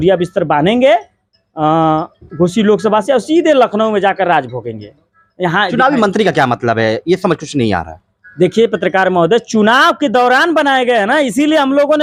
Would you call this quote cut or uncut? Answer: uncut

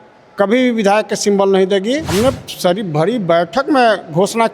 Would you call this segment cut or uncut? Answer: cut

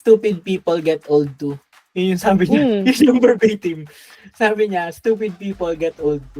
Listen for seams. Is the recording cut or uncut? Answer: uncut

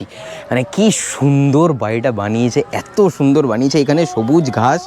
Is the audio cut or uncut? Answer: uncut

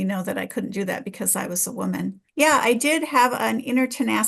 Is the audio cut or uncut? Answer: cut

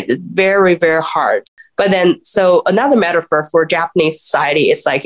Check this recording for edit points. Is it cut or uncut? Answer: cut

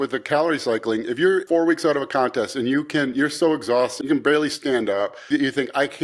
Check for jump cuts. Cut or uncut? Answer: cut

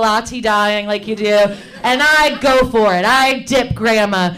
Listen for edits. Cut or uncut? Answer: uncut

